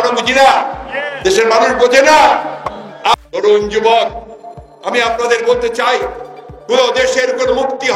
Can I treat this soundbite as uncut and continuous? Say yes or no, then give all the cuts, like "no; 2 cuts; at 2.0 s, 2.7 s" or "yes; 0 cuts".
no; 1 cut; at 3.1 s